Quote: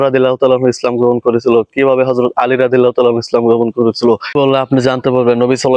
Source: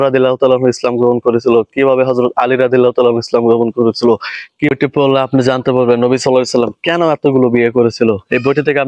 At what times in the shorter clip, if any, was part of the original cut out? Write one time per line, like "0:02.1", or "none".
0:04.3